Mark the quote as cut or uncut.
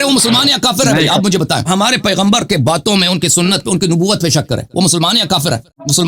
uncut